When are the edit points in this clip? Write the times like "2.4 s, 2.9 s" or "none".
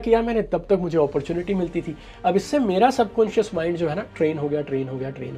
none